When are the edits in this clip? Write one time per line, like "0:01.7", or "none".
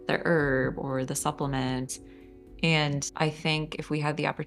0:01.9
0:03.1